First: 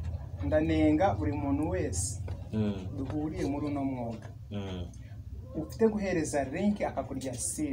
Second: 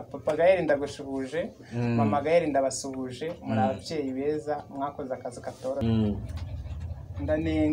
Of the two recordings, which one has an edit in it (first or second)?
second